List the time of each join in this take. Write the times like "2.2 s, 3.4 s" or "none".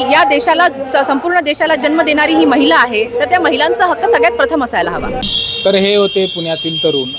none